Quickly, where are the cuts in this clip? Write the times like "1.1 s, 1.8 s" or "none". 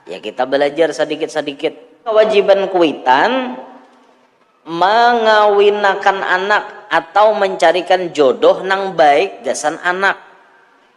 2.1 s